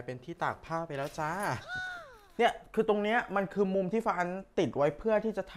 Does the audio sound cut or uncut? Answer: cut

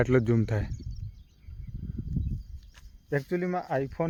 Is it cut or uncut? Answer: uncut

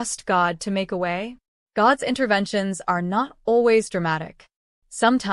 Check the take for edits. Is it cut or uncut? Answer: uncut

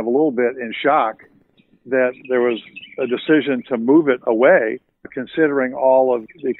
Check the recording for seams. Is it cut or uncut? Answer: uncut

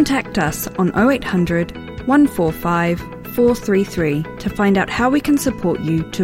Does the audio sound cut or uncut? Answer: uncut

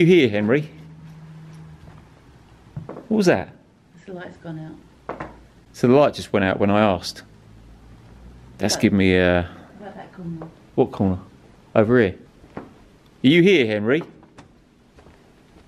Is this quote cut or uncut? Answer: uncut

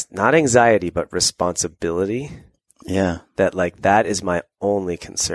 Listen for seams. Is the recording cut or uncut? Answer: uncut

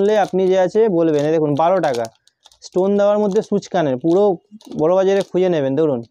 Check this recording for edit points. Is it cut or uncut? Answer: uncut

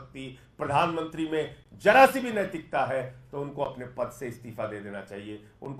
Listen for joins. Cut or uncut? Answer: uncut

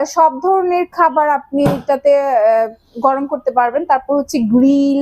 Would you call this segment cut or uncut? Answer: uncut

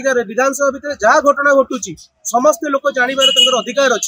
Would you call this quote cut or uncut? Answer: uncut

